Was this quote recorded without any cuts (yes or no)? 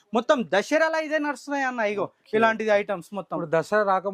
yes